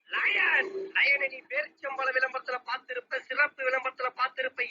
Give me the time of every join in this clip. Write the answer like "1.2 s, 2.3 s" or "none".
2.3 s